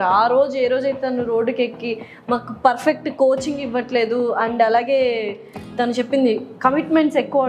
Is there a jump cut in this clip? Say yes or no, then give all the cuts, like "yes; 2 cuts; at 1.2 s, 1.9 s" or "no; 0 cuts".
no; 0 cuts